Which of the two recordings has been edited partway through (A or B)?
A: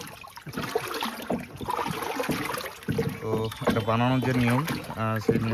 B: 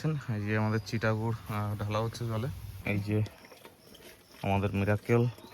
B